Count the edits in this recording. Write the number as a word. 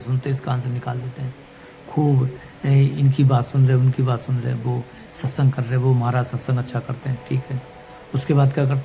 zero